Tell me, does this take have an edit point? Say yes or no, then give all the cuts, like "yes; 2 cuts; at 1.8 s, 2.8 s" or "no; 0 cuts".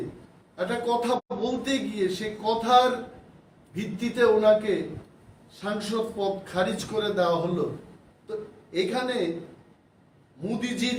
no; 0 cuts